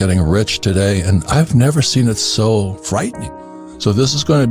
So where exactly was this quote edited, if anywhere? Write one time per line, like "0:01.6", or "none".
0:03.2